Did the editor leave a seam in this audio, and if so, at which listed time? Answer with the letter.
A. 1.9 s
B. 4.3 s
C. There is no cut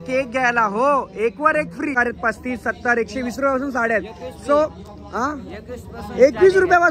A